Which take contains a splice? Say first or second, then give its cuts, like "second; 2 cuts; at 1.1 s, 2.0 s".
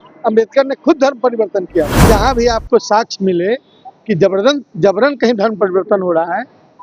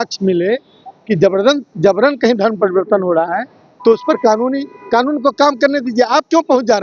first; 1 cut; at 2.0 s